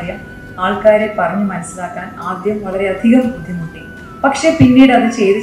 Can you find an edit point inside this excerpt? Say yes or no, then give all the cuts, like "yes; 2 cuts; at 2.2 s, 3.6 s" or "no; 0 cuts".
no; 0 cuts